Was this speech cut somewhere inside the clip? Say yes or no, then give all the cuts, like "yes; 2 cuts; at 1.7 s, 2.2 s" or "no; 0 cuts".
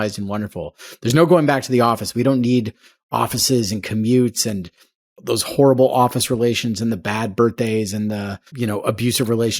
yes; 1 cut; at 8.5 s